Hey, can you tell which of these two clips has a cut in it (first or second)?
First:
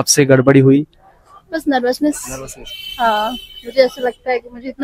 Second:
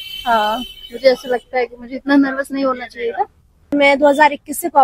second